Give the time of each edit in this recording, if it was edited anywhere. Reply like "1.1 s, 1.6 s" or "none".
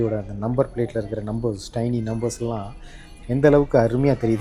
none